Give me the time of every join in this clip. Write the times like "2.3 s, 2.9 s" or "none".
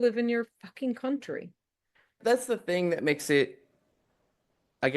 2.1 s